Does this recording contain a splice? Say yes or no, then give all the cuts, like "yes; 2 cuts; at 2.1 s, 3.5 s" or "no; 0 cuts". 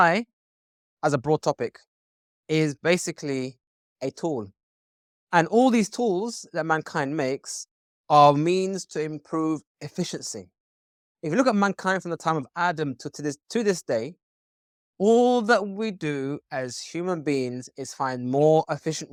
no; 0 cuts